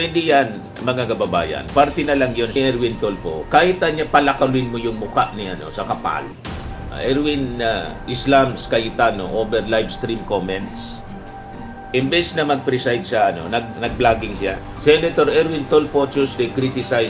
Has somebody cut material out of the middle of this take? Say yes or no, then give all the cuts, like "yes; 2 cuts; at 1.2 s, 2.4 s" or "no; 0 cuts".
yes; 1 cut; at 2.5 s